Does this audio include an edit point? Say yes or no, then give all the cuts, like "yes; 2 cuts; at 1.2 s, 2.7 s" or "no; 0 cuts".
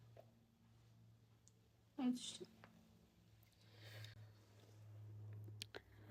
no; 0 cuts